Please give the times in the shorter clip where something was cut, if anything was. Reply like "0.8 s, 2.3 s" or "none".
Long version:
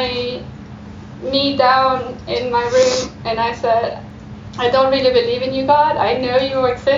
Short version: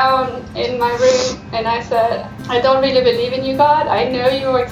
2.3 s